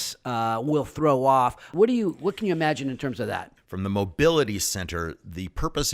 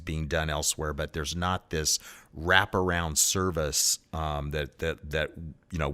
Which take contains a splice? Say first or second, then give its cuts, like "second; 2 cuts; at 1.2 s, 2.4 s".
first; 2 cuts; at 1.7 s, 3.6 s